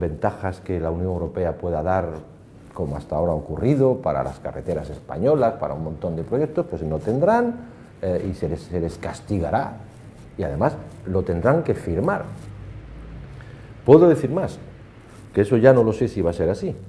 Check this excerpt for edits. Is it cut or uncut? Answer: uncut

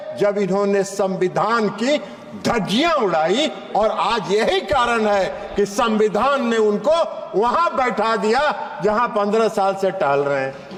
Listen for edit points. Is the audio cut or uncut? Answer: uncut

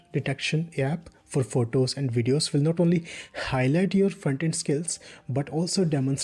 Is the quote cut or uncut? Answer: uncut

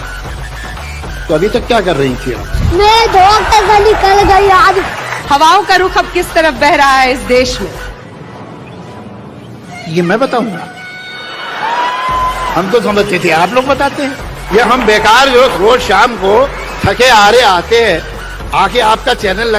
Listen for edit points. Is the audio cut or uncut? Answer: uncut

